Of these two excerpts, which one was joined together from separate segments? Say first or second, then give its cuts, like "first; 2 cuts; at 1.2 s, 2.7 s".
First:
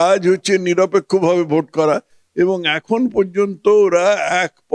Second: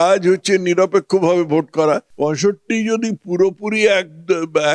second; 1 cut; at 2.1 s